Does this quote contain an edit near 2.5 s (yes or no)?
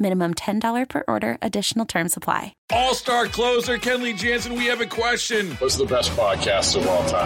yes